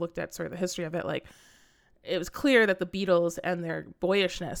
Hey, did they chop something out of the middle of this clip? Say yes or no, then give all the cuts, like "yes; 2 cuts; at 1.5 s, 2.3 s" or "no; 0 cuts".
no; 0 cuts